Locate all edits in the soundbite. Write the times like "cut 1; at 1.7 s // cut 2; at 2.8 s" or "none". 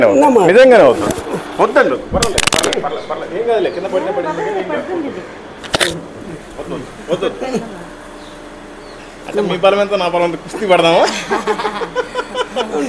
none